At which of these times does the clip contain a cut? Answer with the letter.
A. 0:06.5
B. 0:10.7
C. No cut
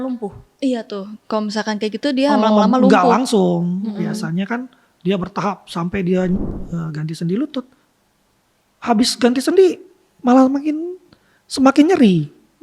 A